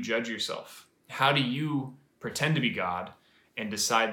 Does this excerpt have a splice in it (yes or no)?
no